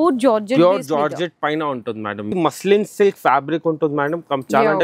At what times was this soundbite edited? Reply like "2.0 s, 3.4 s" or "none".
2.3 s